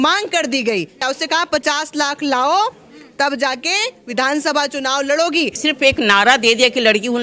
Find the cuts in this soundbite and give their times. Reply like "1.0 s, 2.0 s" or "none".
1.0 s, 5.6 s